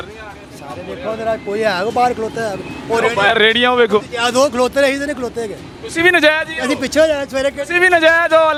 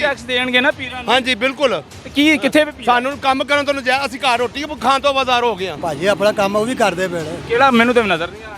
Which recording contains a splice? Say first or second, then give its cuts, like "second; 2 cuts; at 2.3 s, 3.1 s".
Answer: second; 2 cuts; at 2.0 s, 5.7 s